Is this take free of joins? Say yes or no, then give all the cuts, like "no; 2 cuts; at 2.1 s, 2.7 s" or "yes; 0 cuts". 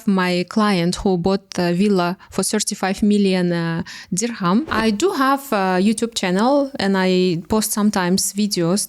no; 1 cut; at 4.7 s